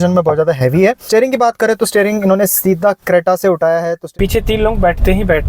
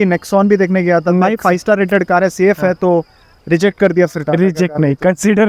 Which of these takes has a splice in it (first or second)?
first